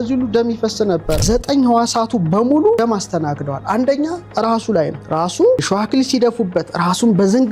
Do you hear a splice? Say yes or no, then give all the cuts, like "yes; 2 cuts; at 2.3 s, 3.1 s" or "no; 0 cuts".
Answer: yes; 4 cuts; at 1.2 s, 2.8 s, 5.0 s, 5.6 s